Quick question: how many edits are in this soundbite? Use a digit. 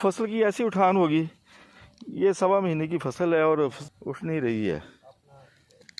0